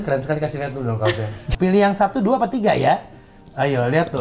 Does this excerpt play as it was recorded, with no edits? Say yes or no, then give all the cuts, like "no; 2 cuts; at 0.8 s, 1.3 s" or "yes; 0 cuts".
no; 1 cut; at 1.5 s